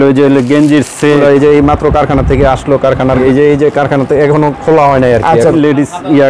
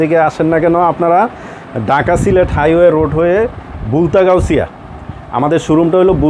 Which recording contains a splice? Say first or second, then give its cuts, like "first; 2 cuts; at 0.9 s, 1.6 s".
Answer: first; 3 cuts; at 1.2 s, 3.2 s, 5.5 s